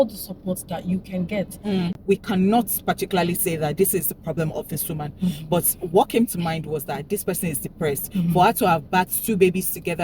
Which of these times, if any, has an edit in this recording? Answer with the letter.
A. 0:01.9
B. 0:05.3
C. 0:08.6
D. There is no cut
A